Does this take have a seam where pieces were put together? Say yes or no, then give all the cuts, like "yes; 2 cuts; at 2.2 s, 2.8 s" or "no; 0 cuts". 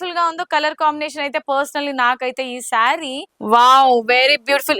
yes; 1 cut; at 3.3 s